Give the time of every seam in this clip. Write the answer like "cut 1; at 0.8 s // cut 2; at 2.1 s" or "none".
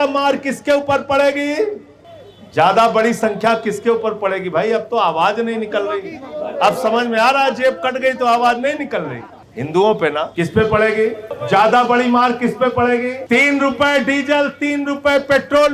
cut 1; at 10.3 s // cut 2; at 11.3 s // cut 3; at 13.2 s